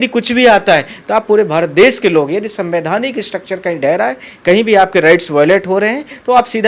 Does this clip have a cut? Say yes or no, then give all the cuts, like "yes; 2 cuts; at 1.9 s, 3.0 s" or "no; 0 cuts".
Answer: no; 0 cuts